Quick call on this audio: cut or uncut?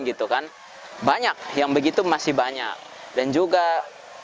uncut